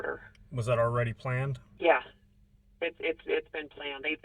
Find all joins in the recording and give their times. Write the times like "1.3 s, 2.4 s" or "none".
1.6 s